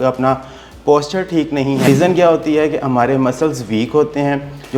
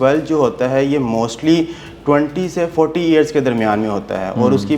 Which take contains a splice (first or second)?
first